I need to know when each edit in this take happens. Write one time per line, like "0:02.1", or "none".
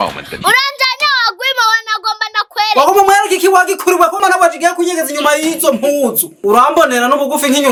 none